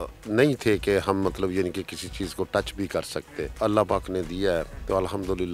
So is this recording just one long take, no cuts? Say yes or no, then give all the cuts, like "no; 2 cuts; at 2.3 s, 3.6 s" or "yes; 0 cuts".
no; 1 cut; at 3.5 s